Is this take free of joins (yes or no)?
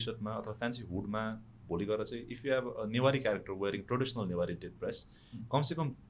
yes